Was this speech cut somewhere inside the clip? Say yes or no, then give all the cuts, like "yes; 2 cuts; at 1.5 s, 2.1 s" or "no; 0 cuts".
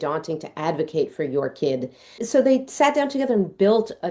no; 0 cuts